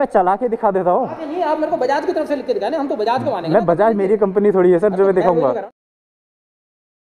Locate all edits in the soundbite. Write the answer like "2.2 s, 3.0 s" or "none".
none

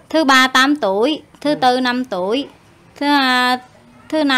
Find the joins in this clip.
none

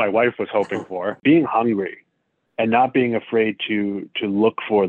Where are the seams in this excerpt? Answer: 1.2 s

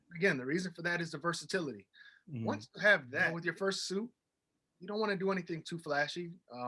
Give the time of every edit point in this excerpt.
3.1 s

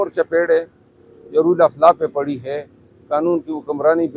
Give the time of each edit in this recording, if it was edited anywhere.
none

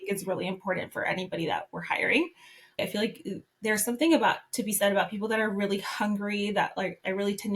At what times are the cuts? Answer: 2.7 s

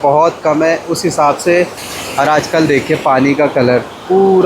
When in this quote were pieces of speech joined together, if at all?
1.9 s

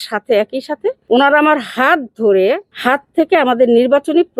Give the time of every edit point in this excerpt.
1.0 s, 2.7 s

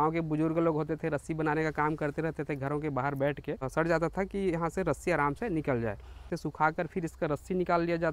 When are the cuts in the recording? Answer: 3.7 s, 6.4 s

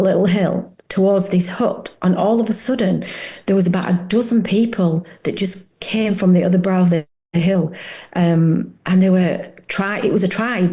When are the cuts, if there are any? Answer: none

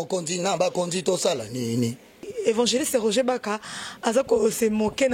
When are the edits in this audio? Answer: 2.3 s

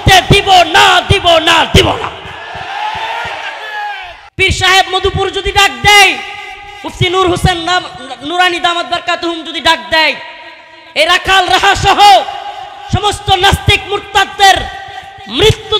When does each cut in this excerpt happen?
4.2 s

